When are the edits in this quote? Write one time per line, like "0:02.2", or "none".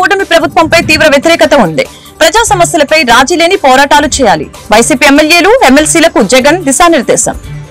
none